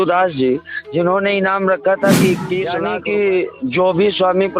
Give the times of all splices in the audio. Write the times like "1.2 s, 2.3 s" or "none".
2.8 s

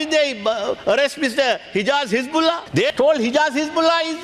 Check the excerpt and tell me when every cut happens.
2.8 s

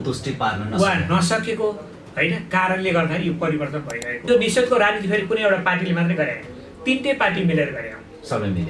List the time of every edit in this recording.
4.2 s

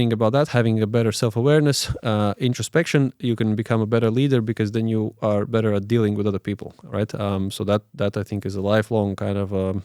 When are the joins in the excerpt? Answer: none

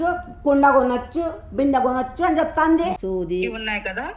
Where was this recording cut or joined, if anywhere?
3.0 s

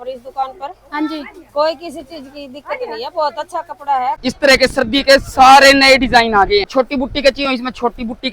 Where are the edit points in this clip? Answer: 4.2 s, 6.7 s

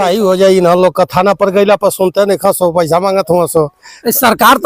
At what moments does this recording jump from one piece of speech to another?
none

